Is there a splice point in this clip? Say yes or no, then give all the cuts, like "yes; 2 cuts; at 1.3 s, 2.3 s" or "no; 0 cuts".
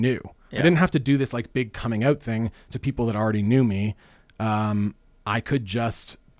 no; 0 cuts